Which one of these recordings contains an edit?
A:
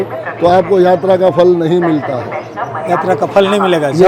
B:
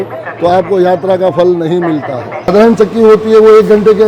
B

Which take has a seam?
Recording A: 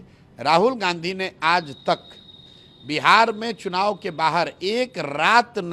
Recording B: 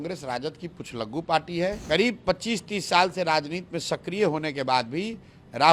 B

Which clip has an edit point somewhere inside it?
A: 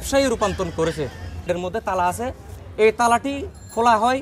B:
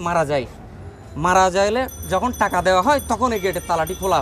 A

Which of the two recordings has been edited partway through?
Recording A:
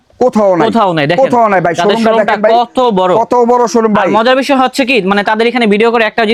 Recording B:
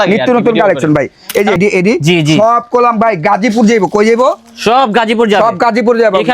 B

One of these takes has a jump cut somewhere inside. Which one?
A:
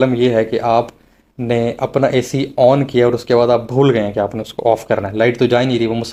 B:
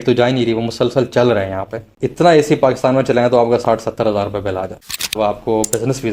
B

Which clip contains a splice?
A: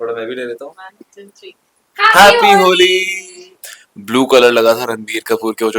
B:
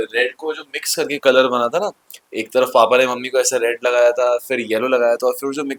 A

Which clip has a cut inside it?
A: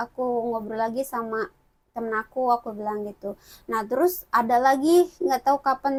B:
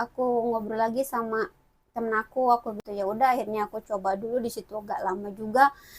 B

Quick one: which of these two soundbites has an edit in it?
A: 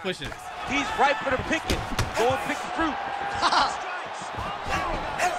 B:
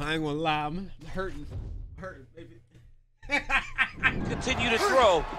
B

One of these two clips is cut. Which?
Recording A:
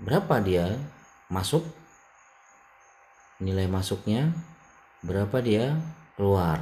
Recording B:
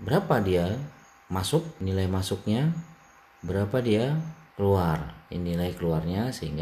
B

